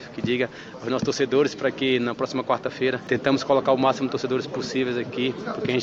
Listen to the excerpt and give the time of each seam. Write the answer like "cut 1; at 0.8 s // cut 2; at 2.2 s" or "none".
cut 1; at 3.0 s